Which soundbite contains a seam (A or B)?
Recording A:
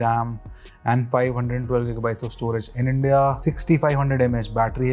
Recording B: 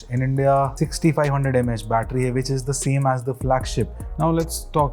B